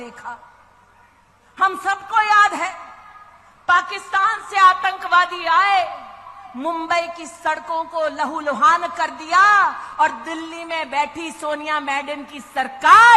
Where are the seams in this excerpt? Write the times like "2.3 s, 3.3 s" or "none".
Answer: none